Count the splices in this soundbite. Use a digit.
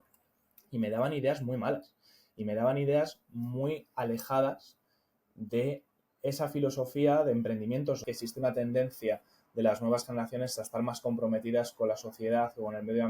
1